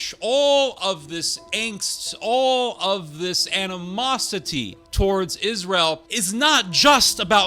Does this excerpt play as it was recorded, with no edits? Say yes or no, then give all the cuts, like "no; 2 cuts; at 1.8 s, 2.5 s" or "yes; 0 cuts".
no; 2 cuts; at 4.8 s, 6.1 s